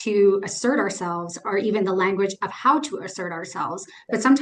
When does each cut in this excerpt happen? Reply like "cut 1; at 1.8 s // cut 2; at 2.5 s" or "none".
none

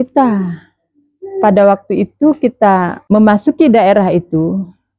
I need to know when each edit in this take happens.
cut 1; at 2.9 s

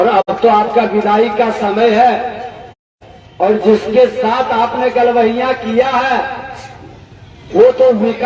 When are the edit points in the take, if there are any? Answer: none

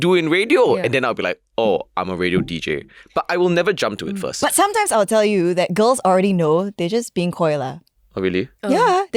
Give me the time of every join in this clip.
none

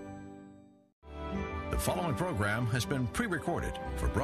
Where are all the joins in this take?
cut 1; at 1.0 s

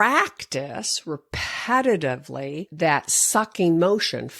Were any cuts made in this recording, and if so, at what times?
cut 1; at 2.6 s

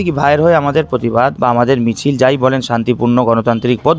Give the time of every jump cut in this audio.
cut 1; at 1.4 s

